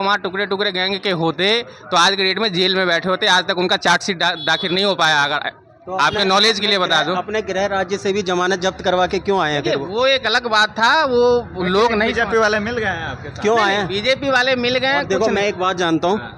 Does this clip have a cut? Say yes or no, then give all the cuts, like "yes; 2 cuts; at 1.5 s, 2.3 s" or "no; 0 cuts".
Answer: no; 0 cuts